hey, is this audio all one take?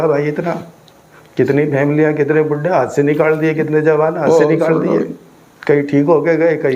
yes; 0 cuts

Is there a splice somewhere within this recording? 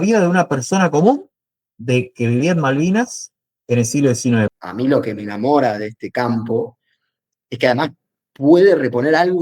yes; 1 cut; at 4.5 s

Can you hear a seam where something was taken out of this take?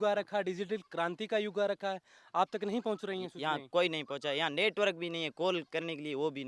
no; 0 cuts

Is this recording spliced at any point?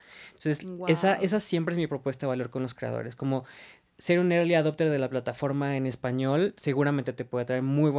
no; 0 cuts

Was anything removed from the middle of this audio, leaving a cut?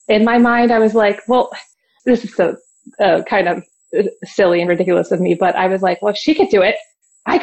yes; 2 cuts; at 1.9 s, 3.7 s

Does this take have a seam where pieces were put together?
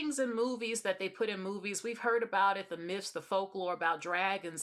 no; 0 cuts

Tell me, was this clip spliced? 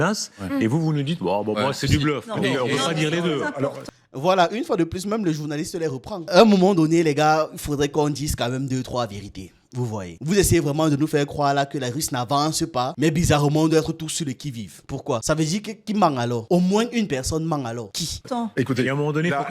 no; 0 cuts

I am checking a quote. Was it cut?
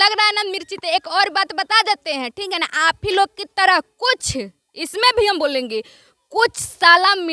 no; 0 cuts

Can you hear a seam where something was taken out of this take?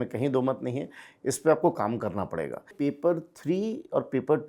yes; 1 cut; at 2.7 s

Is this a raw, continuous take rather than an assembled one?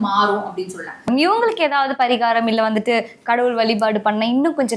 no; 1 cut; at 1.0 s

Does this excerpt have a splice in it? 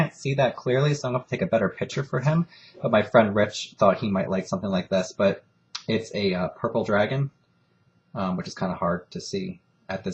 no; 0 cuts

